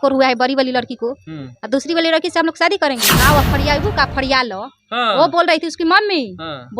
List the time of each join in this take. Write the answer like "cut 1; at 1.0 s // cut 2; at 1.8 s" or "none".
cut 1; at 3.1 s